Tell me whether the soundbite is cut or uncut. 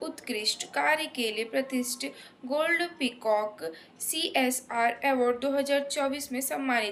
uncut